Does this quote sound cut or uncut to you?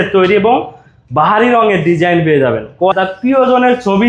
cut